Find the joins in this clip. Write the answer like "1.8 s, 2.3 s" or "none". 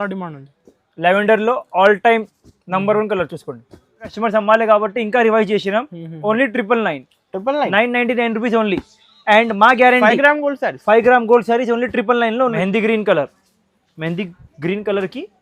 4.1 s, 12.6 s